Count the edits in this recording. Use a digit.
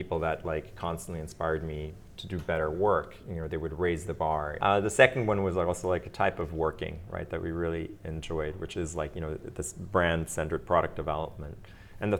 1